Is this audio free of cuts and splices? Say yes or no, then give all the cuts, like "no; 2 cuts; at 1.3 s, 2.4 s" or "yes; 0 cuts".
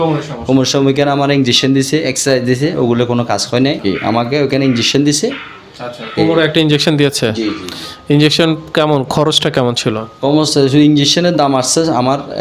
no; 1 cut; at 3.8 s